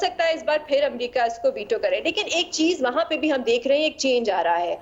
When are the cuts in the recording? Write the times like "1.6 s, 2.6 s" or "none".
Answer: none